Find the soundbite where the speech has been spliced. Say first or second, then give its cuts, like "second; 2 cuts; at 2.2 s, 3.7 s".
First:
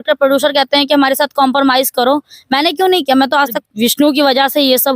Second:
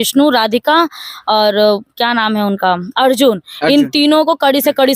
first; 1 cut; at 3.6 s